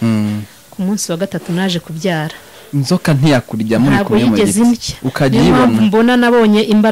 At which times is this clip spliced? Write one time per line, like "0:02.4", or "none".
none